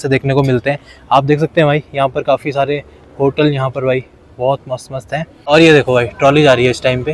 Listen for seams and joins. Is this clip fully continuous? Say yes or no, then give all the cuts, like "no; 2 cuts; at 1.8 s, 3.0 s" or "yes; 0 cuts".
no; 1 cut; at 5.3 s